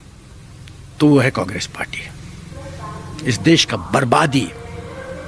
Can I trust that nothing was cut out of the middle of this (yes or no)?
yes